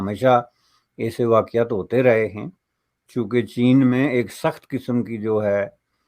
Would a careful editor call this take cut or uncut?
uncut